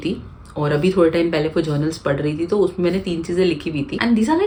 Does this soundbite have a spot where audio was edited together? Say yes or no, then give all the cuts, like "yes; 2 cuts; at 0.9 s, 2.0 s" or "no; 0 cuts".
no; 0 cuts